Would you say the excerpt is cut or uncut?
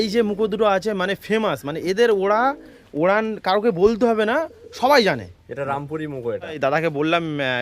cut